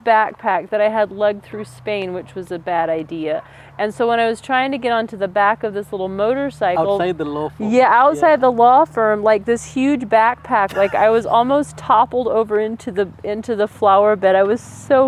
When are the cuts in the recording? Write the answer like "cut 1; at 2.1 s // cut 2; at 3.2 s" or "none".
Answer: none